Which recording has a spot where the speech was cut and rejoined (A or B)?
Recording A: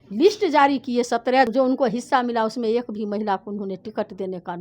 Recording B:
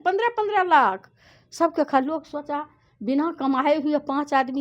A